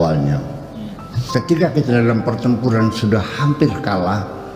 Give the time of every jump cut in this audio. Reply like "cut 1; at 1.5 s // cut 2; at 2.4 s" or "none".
cut 1; at 1.2 s